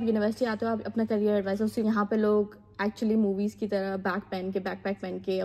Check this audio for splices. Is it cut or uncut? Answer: cut